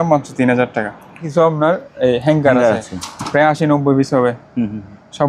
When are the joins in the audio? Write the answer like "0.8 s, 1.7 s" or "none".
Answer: 1.3 s